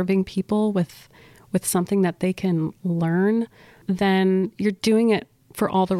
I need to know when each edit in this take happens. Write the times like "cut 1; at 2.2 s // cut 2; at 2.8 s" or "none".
cut 1; at 3.8 s

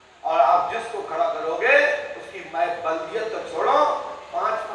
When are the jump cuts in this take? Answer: none

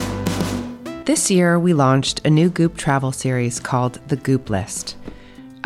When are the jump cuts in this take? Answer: cut 1; at 1.0 s

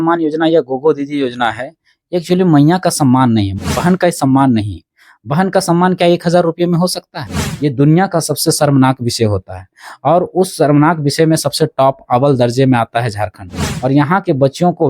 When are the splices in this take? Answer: cut 1; at 3.5 s // cut 2; at 7.3 s

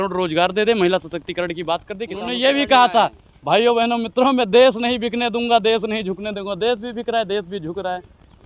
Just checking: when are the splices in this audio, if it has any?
cut 1; at 2.3 s

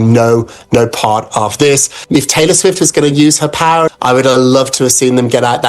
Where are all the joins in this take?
cut 1; at 1.9 s // cut 2; at 3.9 s

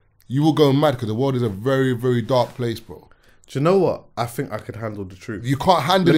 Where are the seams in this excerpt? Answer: none

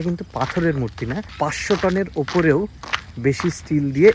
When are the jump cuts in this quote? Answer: cut 1; at 1.3 s

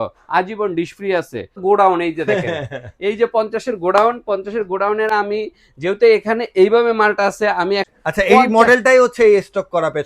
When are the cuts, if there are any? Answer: cut 1; at 1.5 s // cut 2; at 7.9 s

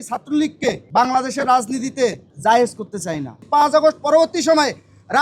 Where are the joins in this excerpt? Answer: cut 1; at 0.8 s // cut 2; at 2.3 s // cut 3; at 3.4 s

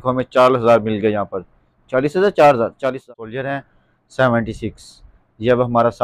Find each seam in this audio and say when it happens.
cut 1; at 3.1 s

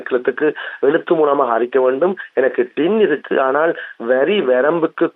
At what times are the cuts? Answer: none

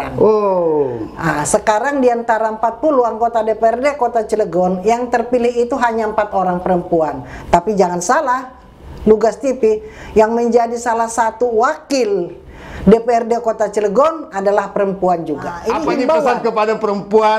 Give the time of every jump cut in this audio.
cut 1; at 15.6 s

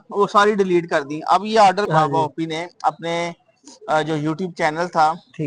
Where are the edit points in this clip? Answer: cut 1; at 1.9 s

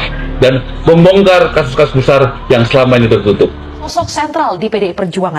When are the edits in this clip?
cut 1; at 3.9 s

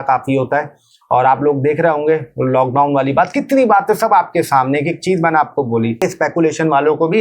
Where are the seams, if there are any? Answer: cut 1; at 6.0 s

